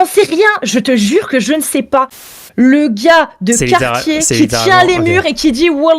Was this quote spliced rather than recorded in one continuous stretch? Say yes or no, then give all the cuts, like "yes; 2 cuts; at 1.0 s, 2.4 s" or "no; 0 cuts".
yes; 1 cut; at 2.2 s